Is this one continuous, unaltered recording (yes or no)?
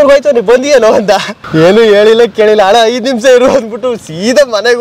no